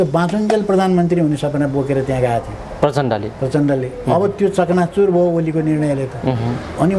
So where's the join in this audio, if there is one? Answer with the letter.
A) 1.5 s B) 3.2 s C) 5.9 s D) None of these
D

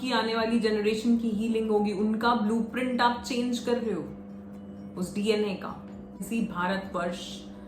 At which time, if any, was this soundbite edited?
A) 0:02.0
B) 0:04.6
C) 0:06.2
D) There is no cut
C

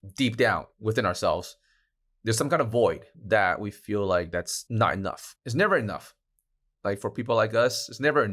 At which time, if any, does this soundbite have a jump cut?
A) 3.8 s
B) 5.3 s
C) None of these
B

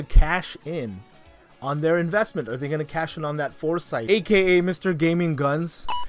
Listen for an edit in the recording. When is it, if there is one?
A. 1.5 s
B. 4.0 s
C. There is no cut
B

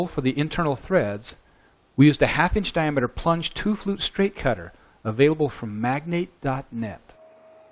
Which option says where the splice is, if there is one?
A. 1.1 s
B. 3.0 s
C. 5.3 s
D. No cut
B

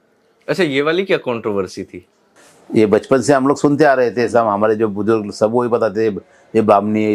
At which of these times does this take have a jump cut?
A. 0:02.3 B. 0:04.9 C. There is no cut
C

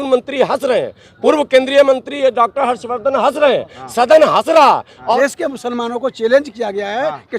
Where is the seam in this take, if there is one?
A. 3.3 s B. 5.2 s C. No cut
B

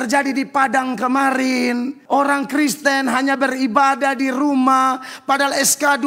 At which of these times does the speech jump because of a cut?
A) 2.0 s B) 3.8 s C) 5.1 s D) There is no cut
A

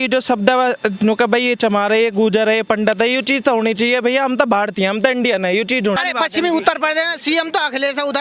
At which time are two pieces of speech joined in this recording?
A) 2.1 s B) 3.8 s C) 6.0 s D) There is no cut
C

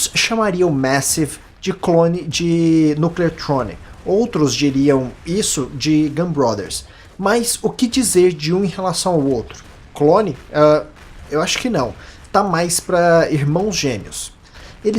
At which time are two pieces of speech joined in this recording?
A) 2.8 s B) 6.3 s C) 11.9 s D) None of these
A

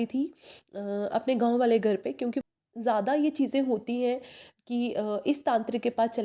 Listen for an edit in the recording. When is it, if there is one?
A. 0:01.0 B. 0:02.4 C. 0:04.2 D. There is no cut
B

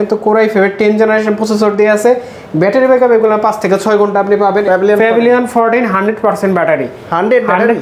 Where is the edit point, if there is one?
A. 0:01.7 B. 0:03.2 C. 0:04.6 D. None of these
C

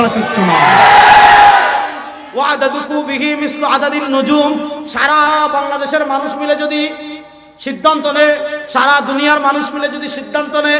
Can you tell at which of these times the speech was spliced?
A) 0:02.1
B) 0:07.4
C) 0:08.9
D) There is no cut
A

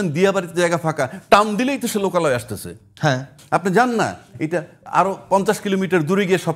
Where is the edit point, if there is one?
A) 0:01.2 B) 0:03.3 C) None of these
B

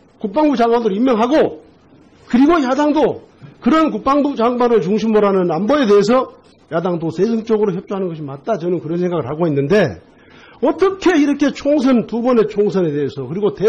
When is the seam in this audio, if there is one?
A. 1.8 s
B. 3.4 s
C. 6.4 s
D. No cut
C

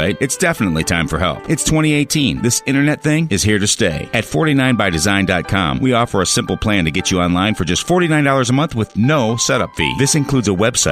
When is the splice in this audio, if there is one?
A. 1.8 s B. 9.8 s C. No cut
C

